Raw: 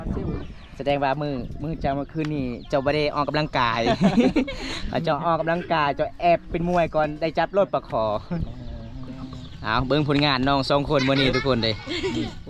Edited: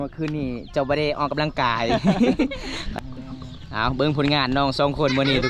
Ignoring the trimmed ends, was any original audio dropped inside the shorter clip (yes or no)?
yes